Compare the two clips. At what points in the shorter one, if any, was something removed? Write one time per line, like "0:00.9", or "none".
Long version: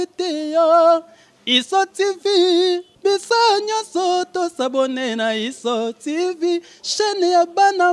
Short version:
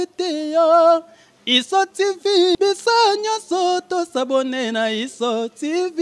0:02.6